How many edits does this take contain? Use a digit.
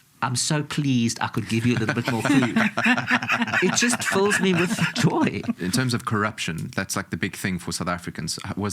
1